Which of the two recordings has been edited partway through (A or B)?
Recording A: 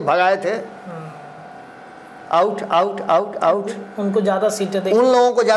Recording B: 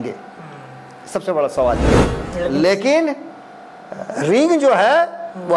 B